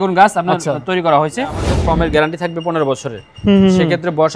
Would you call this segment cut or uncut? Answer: cut